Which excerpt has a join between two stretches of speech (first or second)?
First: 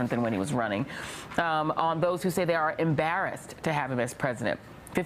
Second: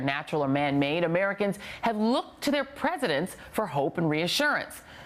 second